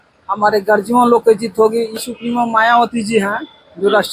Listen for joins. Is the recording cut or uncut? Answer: cut